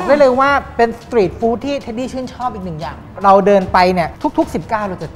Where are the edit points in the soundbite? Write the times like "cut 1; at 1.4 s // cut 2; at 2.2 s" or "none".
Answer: cut 1; at 3.0 s // cut 2; at 4.1 s